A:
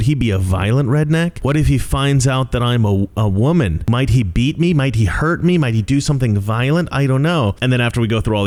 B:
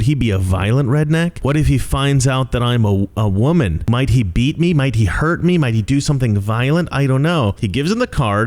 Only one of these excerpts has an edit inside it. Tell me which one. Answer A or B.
B